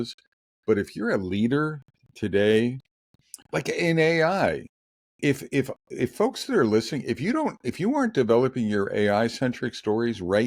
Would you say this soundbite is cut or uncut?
uncut